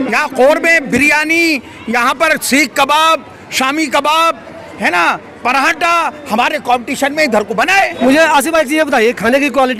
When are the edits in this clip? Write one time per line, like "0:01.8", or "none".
none